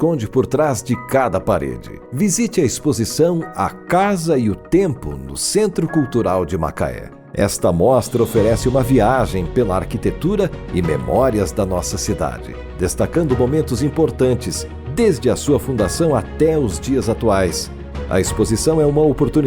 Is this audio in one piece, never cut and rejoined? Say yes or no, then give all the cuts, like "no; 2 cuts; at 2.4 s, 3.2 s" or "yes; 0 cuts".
yes; 0 cuts